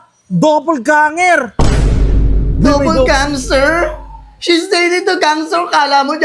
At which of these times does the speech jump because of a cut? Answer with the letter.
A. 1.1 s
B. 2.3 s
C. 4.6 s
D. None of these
D